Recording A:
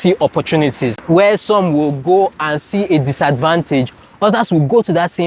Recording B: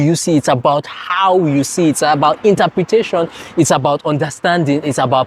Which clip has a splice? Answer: A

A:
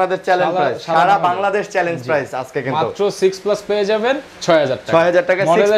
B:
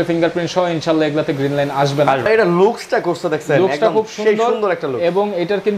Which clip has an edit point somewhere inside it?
B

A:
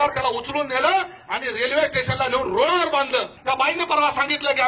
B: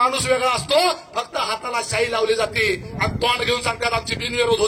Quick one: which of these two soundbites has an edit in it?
A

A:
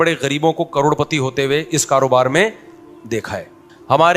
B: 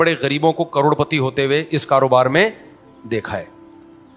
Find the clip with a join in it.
A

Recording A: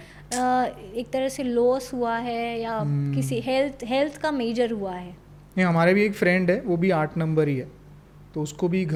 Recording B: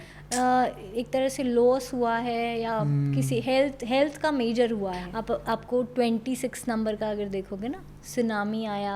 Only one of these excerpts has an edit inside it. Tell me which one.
B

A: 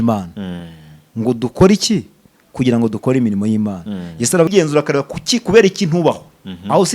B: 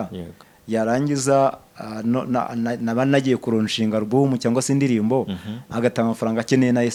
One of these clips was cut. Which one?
A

